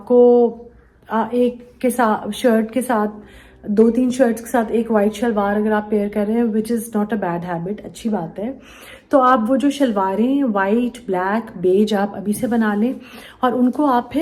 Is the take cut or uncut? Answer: uncut